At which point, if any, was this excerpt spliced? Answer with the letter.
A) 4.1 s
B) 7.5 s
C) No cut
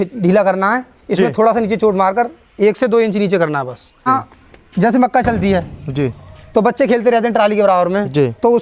A